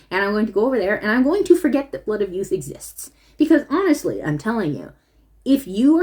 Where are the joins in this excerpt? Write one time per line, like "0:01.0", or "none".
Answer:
none